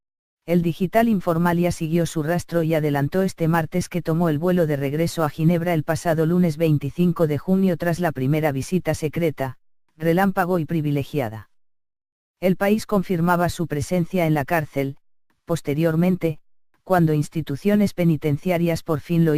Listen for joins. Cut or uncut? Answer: cut